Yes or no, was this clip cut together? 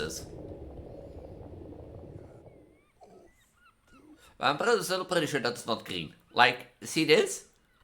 yes